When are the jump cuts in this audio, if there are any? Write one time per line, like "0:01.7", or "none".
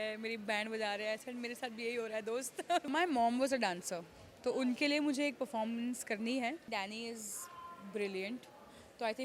0:02.9
0:06.7